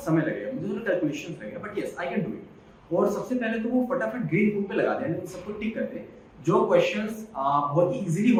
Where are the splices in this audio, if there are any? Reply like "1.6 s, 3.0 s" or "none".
none